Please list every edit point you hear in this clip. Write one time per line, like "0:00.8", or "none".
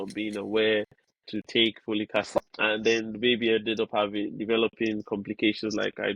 0:02.4